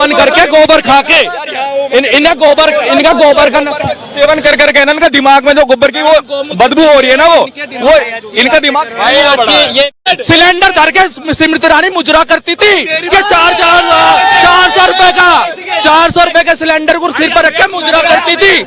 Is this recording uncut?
no; 1 cut; at 10.1 s

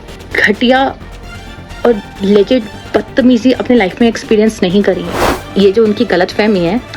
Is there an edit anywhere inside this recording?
yes; 1 cut; at 5.2 s

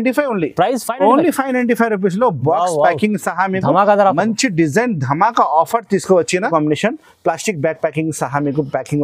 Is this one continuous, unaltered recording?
no; 1 cut; at 6.5 s

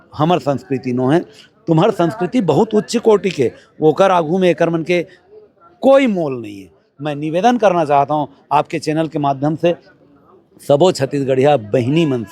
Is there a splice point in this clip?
no; 0 cuts

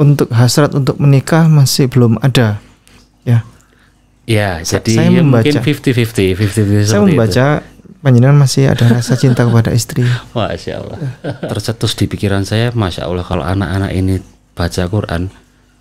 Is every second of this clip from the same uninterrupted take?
no; 2 cuts; at 11.4 s, 13.3 s

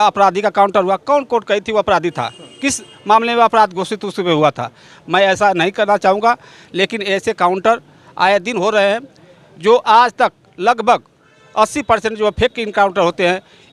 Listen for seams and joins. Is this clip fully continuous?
yes; 0 cuts

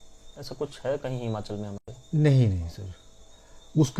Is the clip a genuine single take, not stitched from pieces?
yes; 0 cuts

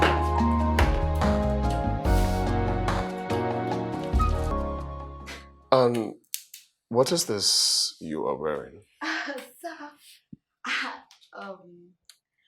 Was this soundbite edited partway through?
yes; 1 cut; at 4.5 s

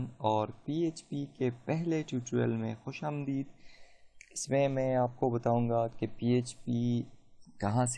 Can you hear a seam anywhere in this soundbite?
no; 0 cuts

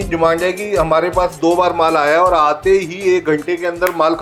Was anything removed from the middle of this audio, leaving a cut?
no; 0 cuts

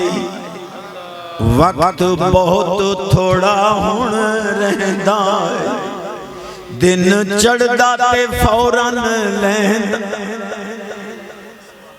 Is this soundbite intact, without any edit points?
yes; 0 cuts

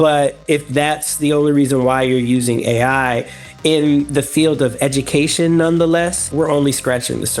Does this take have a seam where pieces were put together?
yes; 1 cut; at 6.3 s

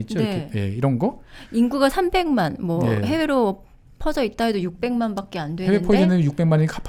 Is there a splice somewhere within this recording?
no; 0 cuts

